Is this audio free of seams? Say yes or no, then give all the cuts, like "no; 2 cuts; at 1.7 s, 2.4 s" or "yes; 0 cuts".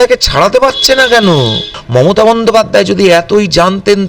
no; 1 cut; at 1.7 s